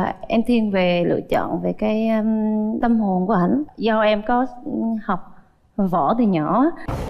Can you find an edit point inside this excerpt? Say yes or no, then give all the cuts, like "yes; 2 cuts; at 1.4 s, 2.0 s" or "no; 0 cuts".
yes; 1 cut; at 3.7 s